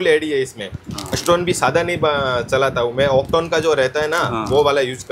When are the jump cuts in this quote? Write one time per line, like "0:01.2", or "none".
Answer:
none